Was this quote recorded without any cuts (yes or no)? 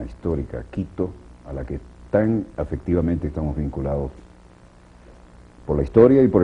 yes